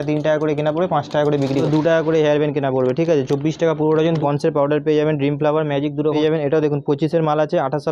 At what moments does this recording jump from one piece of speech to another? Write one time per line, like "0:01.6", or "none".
0:01.7
0:04.2
0:06.2